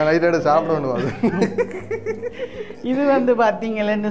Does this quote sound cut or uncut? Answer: uncut